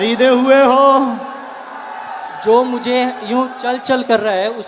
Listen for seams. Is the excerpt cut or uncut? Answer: uncut